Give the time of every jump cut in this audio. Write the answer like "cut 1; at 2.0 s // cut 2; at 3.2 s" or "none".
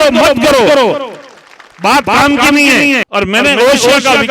cut 1; at 3.1 s